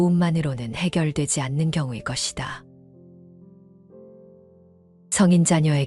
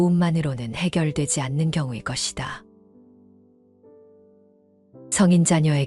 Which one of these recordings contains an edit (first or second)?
first